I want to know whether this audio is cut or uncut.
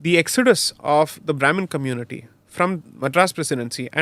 uncut